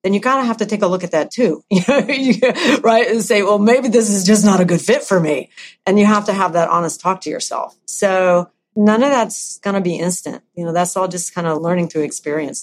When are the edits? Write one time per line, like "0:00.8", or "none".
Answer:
0:08.7
0:09.6
0:11.6